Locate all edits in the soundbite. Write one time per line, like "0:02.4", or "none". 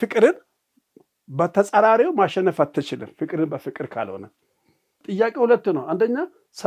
0:05.0